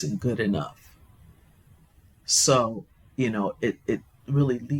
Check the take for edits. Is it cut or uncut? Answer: uncut